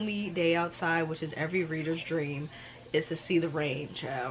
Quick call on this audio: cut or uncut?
uncut